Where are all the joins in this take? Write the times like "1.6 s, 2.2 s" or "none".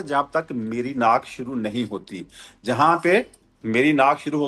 none